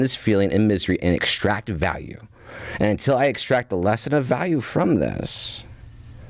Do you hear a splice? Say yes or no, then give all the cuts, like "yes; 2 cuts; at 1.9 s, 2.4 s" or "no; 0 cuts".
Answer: no; 0 cuts